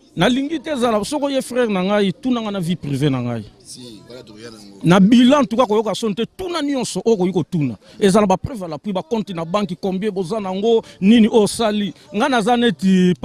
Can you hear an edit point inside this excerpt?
no; 0 cuts

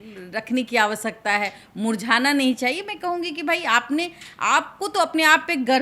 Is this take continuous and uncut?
yes; 0 cuts

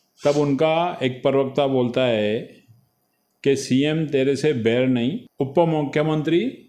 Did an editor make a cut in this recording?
yes; 2 cuts; at 2.8 s, 5.2 s

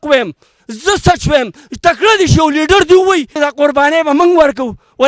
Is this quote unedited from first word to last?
no; 1 cut; at 3.3 s

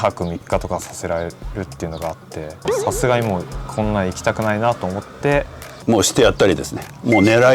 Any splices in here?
yes; 1 cut; at 5.6 s

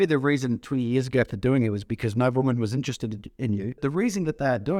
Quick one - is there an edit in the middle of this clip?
yes; 1 cut; at 3.8 s

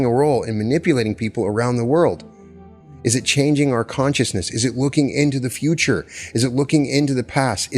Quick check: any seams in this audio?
no; 0 cuts

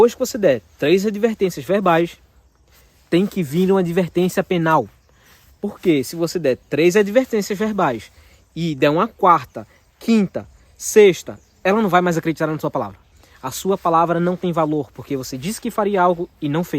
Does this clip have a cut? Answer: no; 0 cuts

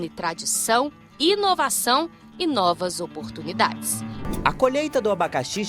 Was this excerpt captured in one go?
no; 1 cut; at 4.2 s

